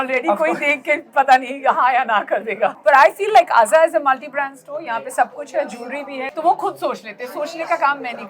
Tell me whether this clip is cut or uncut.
cut